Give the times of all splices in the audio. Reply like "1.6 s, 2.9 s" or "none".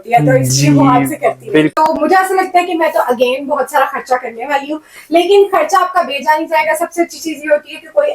1.7 s